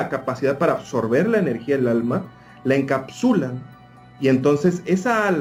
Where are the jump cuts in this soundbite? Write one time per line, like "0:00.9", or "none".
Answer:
none